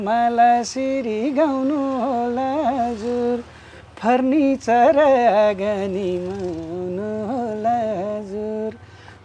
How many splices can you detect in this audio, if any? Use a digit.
0